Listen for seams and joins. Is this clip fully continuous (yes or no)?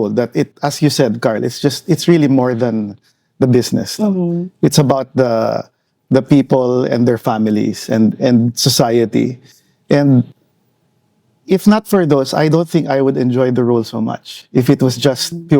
yes